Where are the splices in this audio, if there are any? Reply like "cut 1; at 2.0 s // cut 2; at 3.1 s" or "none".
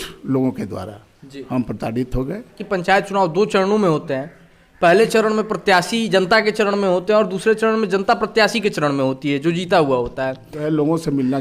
cut 1; at 2.6 s // cut 2; at 10.5 s